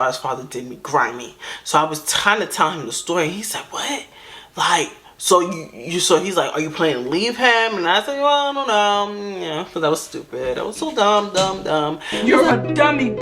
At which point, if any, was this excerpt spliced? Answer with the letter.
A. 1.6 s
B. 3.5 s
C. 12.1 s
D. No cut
C